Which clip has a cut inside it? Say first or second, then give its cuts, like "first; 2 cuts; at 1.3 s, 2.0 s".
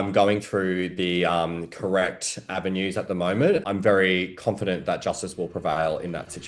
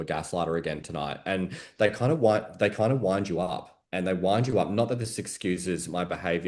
first; 1 cut; at 3.6 s